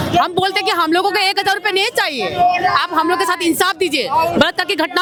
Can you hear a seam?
no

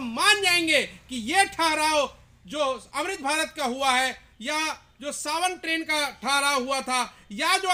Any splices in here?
no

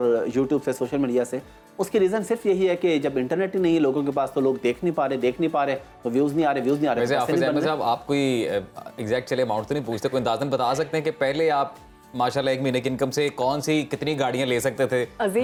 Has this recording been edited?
no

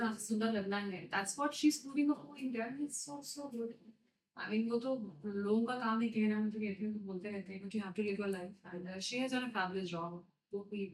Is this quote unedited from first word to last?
yes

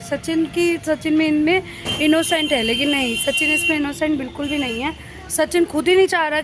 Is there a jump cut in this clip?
no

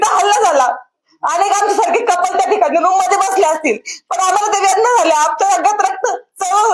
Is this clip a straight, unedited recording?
yes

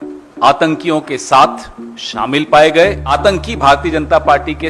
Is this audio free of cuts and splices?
no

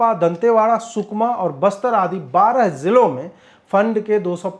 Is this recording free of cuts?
yes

